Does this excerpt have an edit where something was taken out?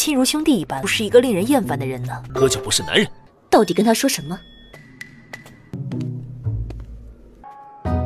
no; 0 cuts

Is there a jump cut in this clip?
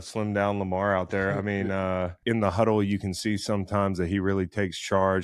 yes; 1 cut; at 2.1 s

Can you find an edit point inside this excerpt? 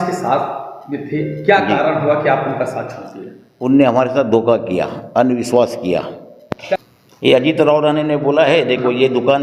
yes; 1 cut; at 6.8 s

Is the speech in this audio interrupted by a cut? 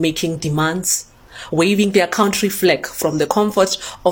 no; 0 cuts

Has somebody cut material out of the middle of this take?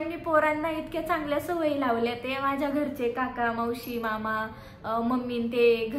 no; 0 cuts

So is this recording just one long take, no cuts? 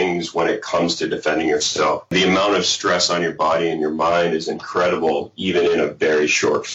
no; 1 cut; at 2.1 s

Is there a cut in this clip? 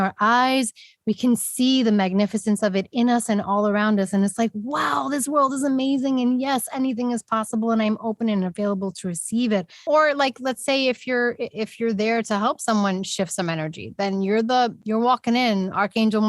yes; 1 cut; at 9.8 s

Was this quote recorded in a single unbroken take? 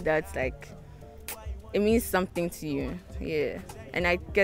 yes; 0 cuts

